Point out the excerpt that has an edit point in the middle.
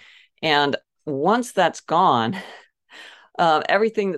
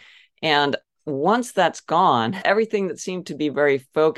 second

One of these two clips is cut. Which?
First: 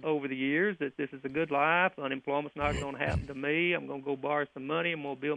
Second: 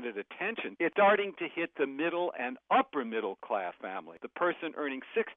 second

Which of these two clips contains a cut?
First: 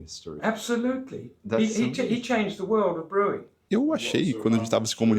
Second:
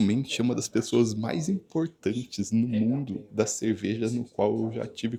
first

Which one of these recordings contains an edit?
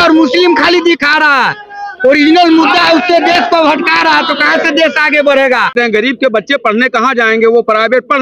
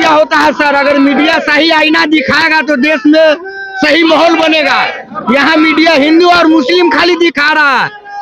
first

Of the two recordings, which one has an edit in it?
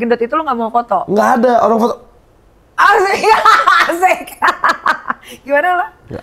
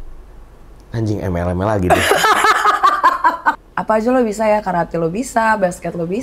second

